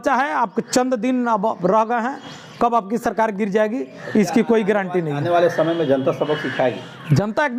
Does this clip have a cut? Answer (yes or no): no